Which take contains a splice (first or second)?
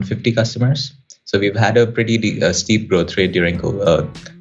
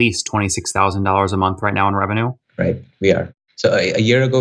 second